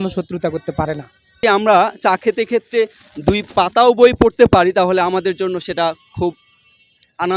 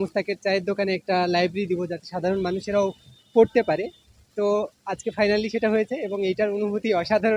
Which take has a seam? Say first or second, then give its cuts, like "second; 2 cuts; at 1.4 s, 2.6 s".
first; 1 cut; at 1.4 s